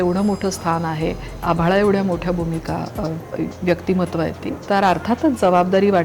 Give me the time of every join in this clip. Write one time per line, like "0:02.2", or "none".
0:01.3
0:04.5